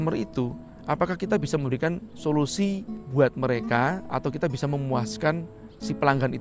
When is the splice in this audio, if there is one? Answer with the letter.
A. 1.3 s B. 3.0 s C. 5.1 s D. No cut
B